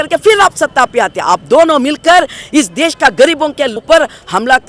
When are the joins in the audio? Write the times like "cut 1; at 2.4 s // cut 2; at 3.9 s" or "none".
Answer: cut 1; at 3.8 s